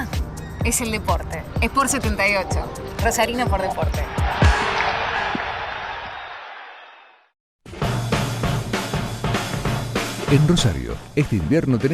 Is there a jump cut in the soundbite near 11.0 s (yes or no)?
no